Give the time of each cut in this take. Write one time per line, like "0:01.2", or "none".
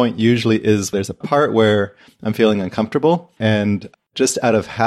0:00.9
0:03.3